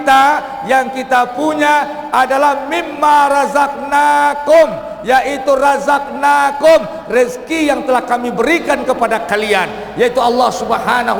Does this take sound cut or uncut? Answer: uncut